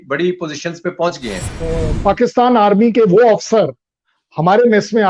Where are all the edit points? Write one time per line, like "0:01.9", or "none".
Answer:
0:01.6

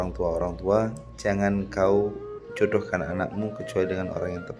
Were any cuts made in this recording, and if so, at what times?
0:01.0

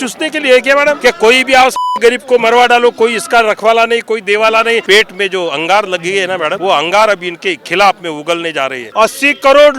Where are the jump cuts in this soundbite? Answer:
0:01.0
0:04.8
0:06.6
0:08.8

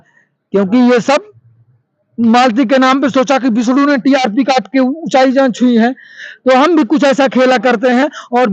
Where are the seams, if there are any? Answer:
none

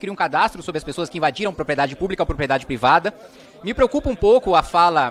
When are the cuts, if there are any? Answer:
none

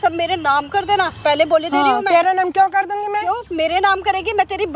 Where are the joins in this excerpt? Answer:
none

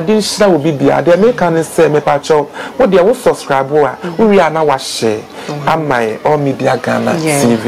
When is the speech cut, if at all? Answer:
none

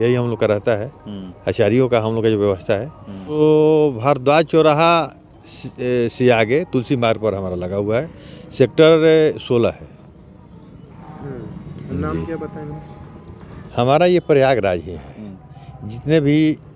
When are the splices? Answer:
0:03.4
0:13.5

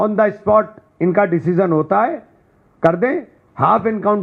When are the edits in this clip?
none

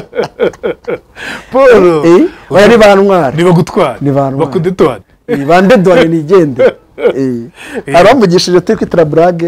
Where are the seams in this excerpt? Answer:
none

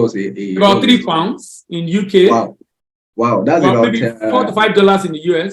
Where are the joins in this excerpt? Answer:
none

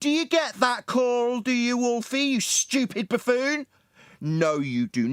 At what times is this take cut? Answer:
none

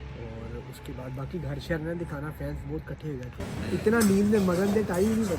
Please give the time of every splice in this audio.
0:03.4

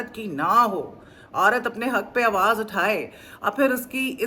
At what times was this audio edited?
none

